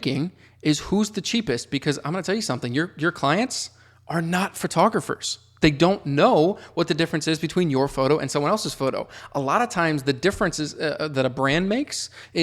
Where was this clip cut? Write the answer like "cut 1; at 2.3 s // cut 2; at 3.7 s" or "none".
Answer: none